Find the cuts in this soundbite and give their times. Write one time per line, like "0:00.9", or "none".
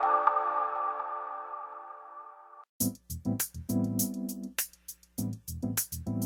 none

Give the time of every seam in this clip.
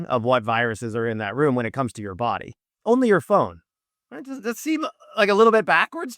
0:02.7

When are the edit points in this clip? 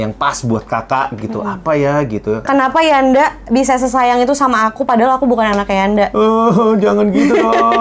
0:02.4

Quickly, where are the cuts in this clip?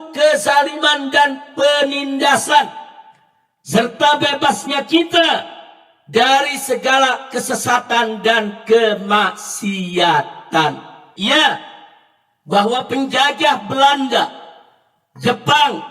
0:11.0

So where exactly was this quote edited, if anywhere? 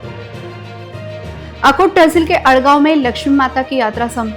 0:01.2

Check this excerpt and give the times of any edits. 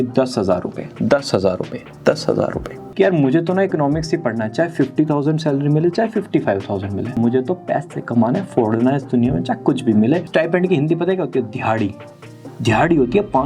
0:02.8
0:07.2
0:10.2

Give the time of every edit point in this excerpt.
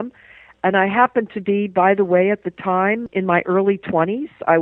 0:03.1

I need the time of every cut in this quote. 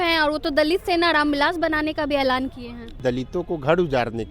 0:03.0

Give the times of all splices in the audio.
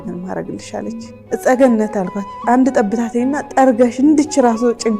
0:01.1

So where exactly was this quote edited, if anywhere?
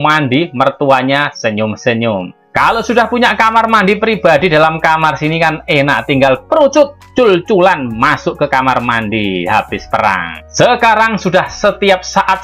0:10.4

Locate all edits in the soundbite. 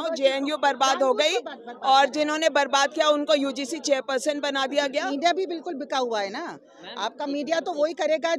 0:05.1

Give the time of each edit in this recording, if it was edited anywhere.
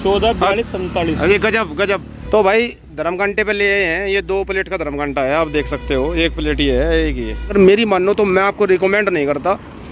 0:02.1
0:07.5

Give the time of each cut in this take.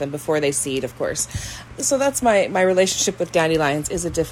0:01.6

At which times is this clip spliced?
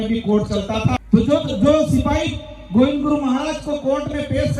0:01.0

